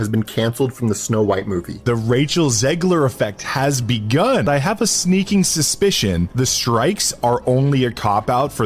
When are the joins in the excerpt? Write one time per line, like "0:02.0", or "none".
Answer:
0:01.8